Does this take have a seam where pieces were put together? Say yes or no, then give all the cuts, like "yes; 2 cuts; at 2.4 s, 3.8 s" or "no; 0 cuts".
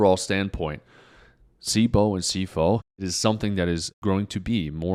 no; 0 cuts